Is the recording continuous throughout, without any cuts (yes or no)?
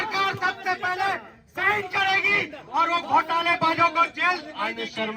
yes